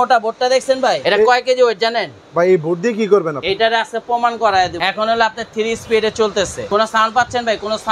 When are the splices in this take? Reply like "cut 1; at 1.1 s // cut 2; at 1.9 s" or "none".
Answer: cut 1; at 1.0 s // cut 2; at 3.4 s // cut 3; at 4.8 s // cut 4; at 6.7 s